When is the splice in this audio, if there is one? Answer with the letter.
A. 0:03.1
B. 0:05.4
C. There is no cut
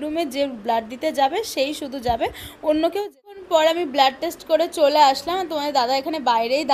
A